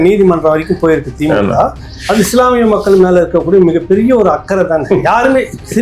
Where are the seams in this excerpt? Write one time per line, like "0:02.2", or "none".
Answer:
none

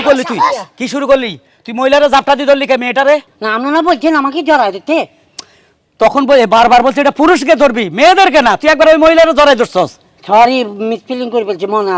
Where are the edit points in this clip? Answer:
none

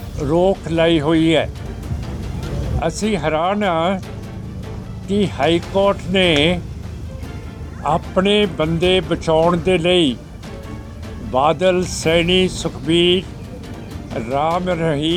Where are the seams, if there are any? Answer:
none

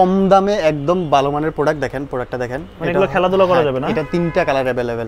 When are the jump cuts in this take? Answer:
none

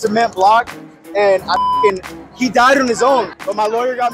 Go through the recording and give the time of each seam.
none

